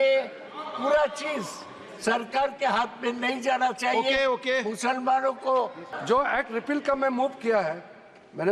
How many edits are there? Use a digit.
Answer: 1